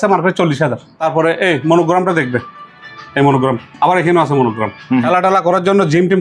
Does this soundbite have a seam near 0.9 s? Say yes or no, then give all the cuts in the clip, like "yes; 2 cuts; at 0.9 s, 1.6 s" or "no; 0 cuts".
yes; 2 cuts; at 0.9 s, 5.1 s